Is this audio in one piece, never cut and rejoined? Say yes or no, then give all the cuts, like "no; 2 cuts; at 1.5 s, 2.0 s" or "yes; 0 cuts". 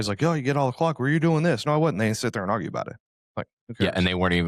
yes; 0 cuts